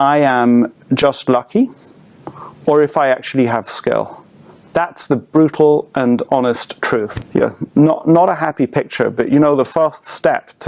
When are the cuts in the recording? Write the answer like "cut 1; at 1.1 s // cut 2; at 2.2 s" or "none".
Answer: cut 1; at 7.2 s